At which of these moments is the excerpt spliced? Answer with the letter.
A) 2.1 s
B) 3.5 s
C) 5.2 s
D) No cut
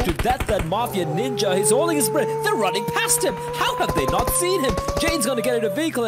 D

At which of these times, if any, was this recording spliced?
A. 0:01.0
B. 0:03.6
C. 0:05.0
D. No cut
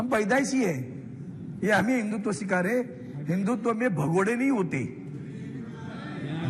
D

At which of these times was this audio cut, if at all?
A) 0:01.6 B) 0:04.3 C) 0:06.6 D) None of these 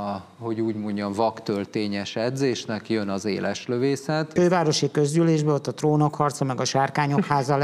B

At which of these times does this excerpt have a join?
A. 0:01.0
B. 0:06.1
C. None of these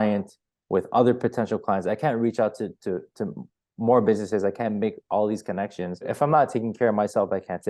B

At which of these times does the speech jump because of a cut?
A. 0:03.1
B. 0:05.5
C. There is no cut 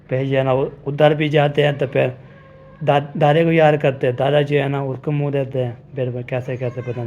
C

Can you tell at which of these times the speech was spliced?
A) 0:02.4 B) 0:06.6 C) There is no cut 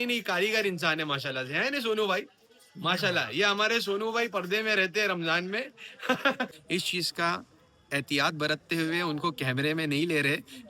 B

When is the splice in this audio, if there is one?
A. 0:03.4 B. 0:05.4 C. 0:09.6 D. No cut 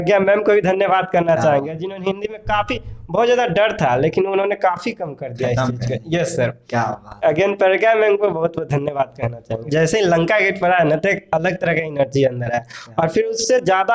C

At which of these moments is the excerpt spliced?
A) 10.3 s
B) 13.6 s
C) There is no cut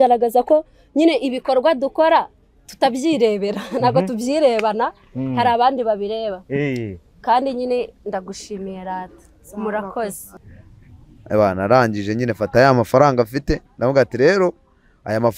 A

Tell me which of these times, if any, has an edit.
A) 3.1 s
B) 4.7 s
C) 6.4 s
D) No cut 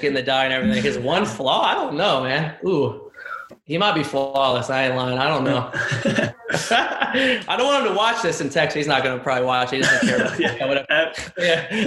C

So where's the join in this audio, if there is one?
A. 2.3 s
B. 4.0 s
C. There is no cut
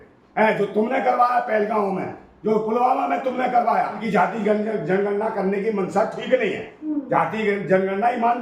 B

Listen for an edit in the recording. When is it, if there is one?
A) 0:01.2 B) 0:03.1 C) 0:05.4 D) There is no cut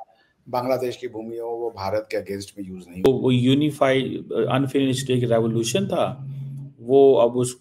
B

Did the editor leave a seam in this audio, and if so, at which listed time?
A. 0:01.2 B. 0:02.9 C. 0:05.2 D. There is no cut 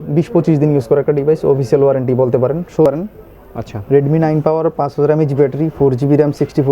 B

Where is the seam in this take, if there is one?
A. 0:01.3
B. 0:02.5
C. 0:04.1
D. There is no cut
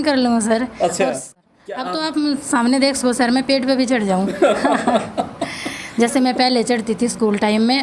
A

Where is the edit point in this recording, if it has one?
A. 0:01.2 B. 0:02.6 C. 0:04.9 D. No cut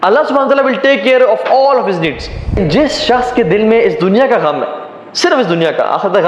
B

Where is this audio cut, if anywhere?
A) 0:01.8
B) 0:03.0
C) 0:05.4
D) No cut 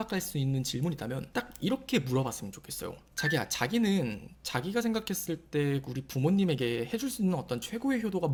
D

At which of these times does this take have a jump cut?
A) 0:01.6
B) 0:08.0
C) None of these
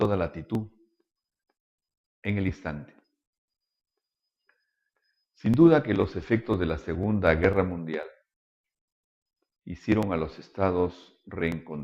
B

